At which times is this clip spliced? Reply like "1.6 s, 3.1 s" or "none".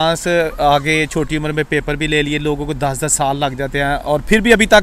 none

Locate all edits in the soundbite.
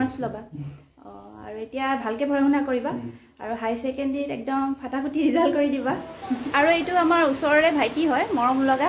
6.5 s

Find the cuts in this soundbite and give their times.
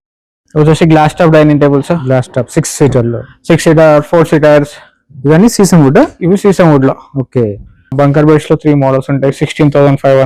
7.9 s

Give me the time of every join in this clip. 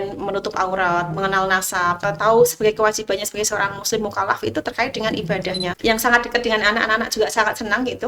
2.0 s, 5.7 s

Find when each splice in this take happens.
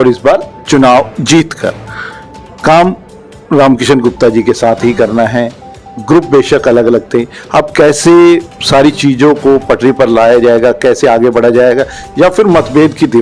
none

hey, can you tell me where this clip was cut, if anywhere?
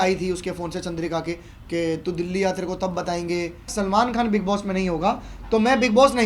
3.7 s

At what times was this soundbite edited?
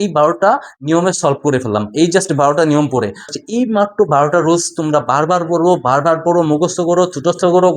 3.3 s

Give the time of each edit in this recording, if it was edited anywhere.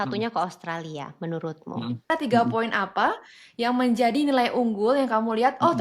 2.1 s

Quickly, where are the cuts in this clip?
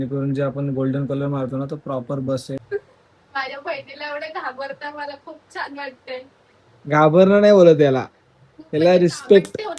2.6 s

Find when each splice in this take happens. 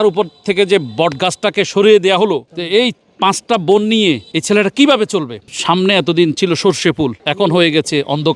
none

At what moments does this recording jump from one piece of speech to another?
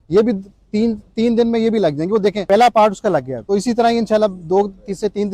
2.4 s, 3.3 s

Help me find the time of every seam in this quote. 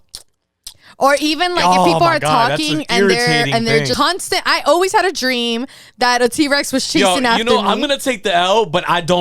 3.9 s

